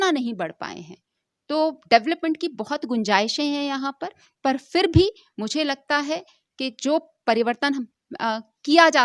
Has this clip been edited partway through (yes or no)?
no